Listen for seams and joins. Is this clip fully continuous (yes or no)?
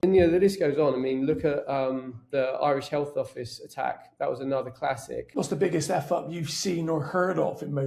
no